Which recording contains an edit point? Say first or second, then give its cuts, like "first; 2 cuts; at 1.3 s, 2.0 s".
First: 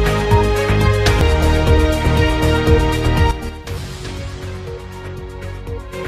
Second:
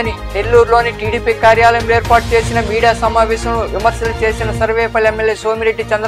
first; 1 cut; at 1.2 s